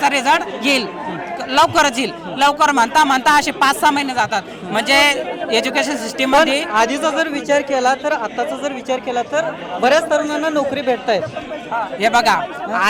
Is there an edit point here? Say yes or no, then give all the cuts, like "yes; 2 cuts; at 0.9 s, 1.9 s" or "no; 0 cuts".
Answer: no; 0 cuts